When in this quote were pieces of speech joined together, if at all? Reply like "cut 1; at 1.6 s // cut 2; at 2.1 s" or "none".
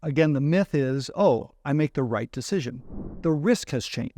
cut 1; at 3.1 s